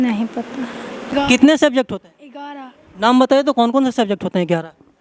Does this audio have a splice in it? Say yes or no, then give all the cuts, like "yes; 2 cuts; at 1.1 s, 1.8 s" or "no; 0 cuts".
yes; 1 cut; at 1.1 s